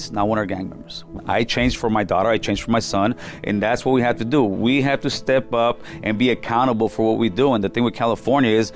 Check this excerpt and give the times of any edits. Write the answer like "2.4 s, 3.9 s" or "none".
1.1 s